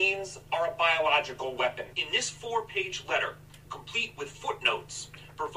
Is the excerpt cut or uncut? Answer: cut